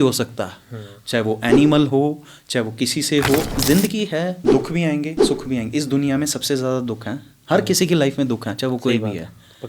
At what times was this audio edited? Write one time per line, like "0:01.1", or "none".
0:03.5